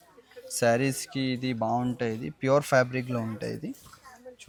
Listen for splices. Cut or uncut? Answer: uncut